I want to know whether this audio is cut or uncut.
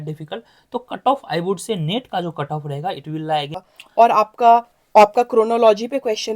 cut